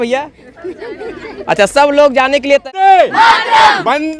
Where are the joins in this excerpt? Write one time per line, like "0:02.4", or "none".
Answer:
0:02.6